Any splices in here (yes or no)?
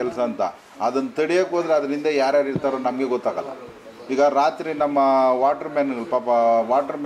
no